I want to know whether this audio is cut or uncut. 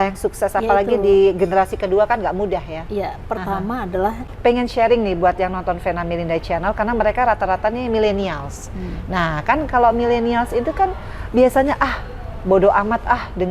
cut